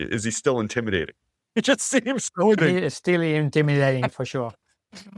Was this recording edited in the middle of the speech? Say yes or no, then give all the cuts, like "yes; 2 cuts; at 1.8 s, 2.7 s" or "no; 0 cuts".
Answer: yes; 2 cuts; at 2.6 s, 4.1 s